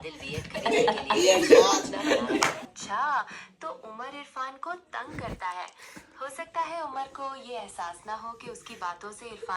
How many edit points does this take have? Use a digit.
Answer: 1